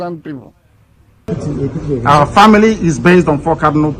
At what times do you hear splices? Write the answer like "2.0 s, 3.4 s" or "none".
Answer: 1.3 s